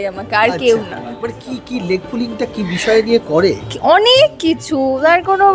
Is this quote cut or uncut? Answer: uncut